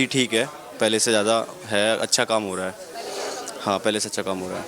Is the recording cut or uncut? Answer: uncut